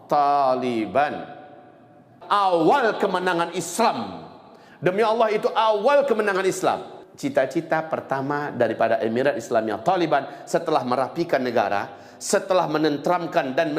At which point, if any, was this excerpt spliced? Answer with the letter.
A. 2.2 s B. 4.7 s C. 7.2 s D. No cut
A